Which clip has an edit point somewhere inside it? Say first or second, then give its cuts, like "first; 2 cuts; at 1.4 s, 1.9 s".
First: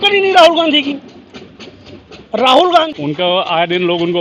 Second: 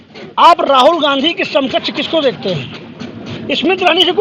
first; 1 cut; at 2.9 s